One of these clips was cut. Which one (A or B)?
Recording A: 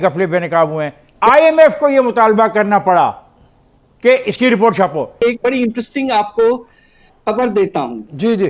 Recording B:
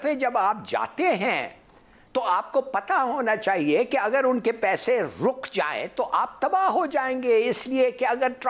A